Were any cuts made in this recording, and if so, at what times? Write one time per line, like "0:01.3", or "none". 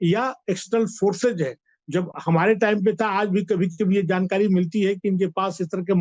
none